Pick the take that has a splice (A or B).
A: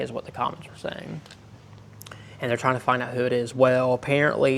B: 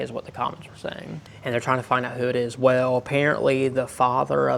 B